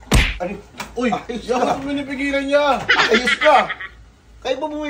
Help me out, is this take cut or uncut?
uncut